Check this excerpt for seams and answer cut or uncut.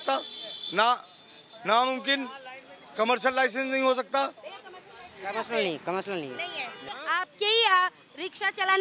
cut